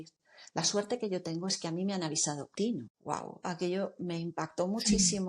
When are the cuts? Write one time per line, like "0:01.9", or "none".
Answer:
0:02.7